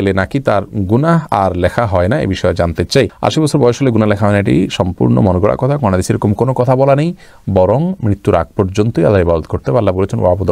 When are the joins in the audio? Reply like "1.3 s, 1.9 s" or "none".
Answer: none